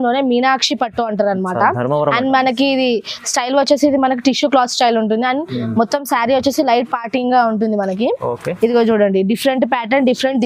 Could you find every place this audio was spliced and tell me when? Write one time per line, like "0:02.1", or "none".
none